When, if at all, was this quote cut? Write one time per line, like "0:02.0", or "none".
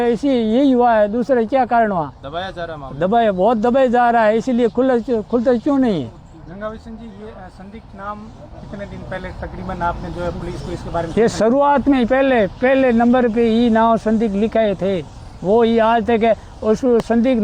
none